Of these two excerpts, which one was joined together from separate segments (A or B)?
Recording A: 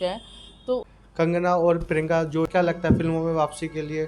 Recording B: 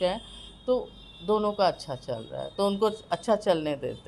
A